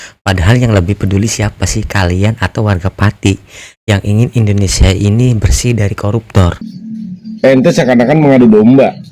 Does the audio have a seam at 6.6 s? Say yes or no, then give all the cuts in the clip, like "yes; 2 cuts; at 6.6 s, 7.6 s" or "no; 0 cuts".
yes; 1 cut; at 6.6 s